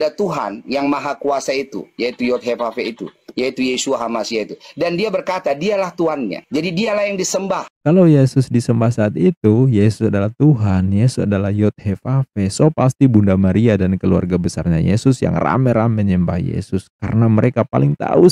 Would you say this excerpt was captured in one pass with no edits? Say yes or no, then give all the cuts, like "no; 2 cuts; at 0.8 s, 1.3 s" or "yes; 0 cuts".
no; 1 cut; at 7.7 s